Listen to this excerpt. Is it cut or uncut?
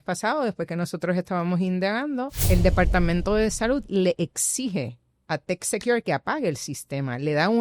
cut